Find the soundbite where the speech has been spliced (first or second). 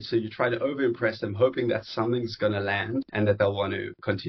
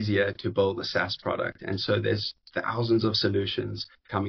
first